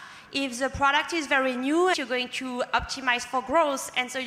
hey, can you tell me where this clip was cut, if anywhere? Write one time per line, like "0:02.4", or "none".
0:02.0